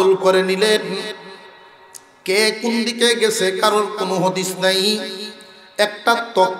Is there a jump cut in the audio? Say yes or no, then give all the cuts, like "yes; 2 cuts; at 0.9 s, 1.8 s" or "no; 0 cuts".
no; 0 cuts